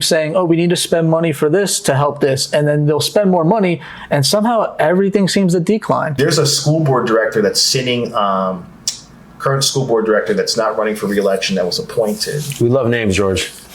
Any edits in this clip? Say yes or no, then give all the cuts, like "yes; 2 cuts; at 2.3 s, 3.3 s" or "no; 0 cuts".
yes; 1 cut; at 6.1 s